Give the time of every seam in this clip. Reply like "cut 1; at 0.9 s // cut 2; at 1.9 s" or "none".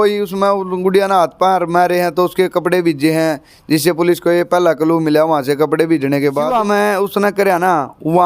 cut 1; at 6.6 s